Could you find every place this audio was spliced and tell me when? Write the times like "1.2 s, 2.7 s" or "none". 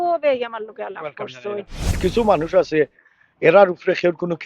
2.0 s